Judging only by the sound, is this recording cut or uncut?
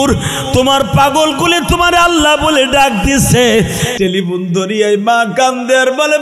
cut